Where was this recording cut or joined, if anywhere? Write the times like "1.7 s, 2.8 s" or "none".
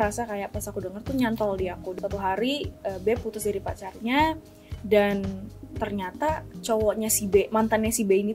1.9 s